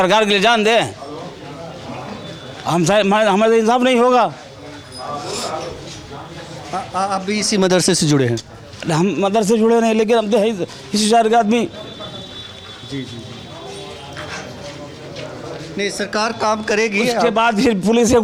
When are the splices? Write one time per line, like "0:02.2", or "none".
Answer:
none